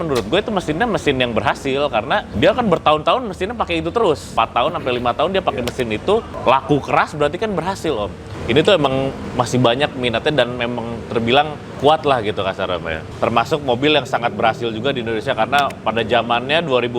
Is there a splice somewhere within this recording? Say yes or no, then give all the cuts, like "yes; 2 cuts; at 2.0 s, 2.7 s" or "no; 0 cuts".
yes; 7 cuts; at 2.3 s, 4.3 s, 6.3 s, 8.3 s, 9.2 s, 11.6 s, 13.0 s